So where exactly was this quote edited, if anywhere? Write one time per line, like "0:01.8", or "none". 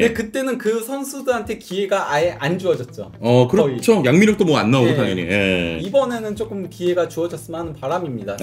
0:05.8